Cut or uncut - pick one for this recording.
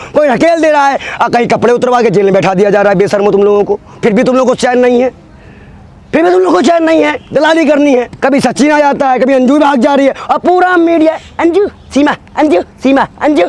cut